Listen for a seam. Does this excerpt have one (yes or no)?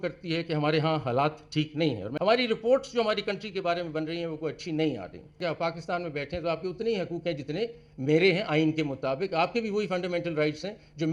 yes